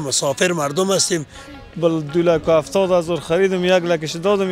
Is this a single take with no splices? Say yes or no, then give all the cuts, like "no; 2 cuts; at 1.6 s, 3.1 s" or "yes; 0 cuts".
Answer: no; 1 cut; at 1.4 s